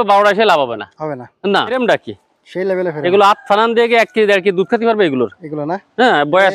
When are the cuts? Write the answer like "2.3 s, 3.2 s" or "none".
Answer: 1.8 s